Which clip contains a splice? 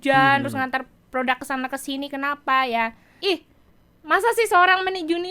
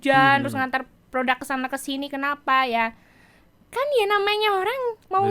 first; 1 cut; at 3.1 s

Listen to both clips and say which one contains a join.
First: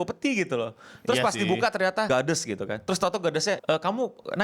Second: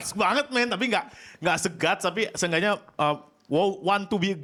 first; 2 cuts; at 2.1 s, 3.6 s

